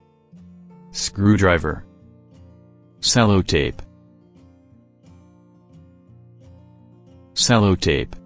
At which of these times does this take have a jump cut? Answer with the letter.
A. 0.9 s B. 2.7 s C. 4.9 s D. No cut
D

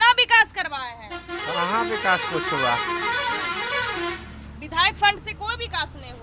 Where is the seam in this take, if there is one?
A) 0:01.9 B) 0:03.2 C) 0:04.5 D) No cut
D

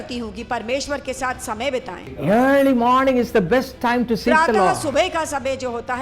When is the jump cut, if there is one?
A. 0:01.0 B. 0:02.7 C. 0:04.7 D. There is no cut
C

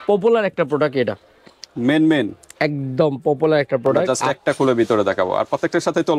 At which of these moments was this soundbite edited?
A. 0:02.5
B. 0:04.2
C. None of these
B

